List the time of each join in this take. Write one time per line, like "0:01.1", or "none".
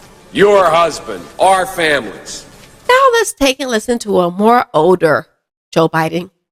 none